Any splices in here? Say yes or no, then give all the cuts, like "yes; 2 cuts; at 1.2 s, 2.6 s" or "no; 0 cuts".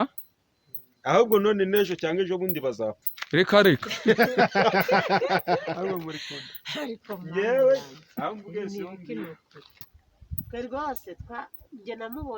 yes; 1 cut; at 9.9 s